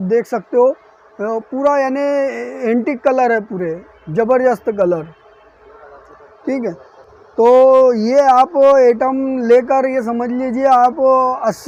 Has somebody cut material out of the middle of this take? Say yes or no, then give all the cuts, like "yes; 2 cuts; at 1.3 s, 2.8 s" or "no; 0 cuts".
no; 0 cuts